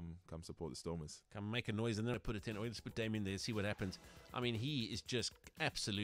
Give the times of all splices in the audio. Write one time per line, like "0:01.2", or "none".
0:02.1